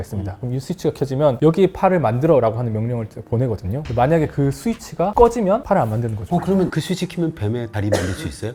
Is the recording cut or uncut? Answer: uncut